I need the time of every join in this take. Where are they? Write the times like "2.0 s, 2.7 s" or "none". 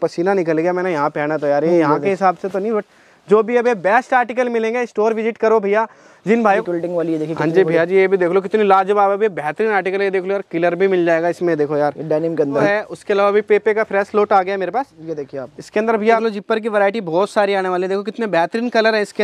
6.6 s, 12.7 s, 16.2 s